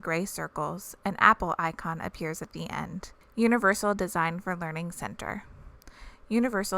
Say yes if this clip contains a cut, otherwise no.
yes